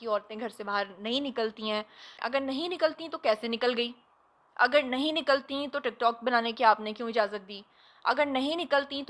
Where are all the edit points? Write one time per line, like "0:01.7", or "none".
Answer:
0:02.2